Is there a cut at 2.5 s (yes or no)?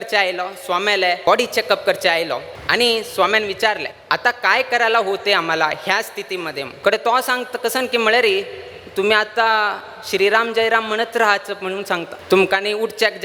yes